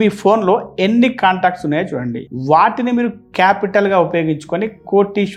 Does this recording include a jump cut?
no; 0 cuts

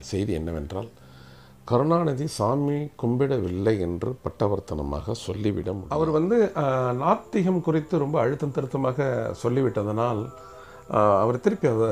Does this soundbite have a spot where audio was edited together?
yes; 1 cut; at 5.8 s

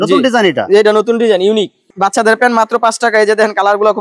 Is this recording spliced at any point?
yes; 1 cut; at 1.9 s

